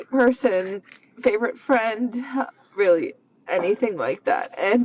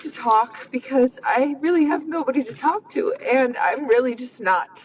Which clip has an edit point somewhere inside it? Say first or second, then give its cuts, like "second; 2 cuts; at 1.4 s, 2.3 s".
first; 1 cut; at 1.7 s